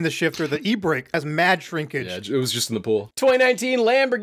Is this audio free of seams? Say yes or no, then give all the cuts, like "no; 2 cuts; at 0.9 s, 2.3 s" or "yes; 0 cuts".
no; 2 cuts; at 2.1 s, 3.1 s